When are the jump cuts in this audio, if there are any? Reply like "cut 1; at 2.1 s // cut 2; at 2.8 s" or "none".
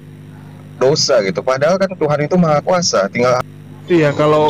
cut 1; at 3.5 s